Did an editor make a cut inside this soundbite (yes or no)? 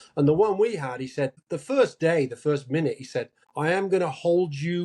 yes